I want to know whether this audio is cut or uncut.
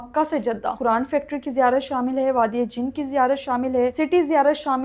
cut